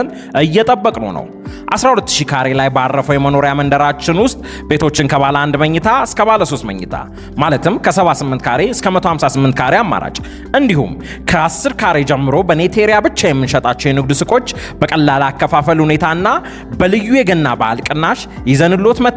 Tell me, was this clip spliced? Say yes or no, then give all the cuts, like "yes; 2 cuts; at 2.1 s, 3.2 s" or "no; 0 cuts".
no; 0 cuts